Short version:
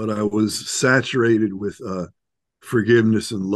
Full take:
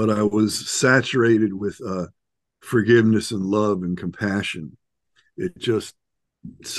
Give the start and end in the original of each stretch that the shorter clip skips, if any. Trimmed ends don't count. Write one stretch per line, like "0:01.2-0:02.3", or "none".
none